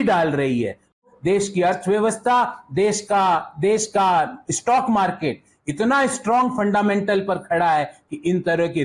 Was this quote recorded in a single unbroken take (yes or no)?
no